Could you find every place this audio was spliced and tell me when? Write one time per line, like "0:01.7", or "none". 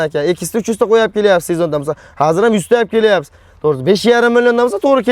none

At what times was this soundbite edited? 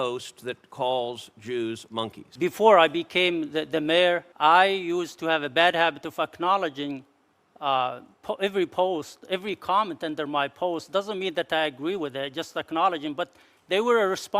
0:02.2
0:04.3

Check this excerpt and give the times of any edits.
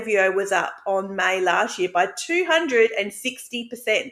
none

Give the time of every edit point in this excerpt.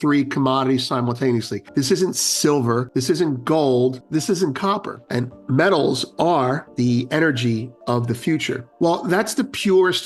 0:01.6
0:02.9
0:04.0
0:05.0
0:06.7
0:08.7

